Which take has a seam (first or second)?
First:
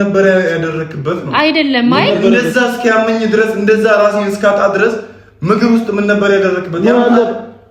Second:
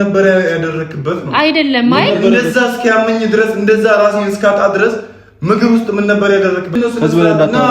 second